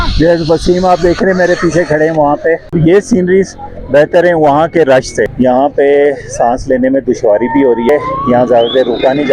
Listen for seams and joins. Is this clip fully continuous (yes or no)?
no